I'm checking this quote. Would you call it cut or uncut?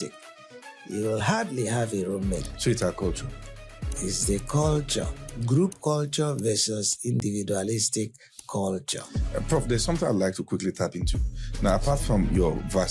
cut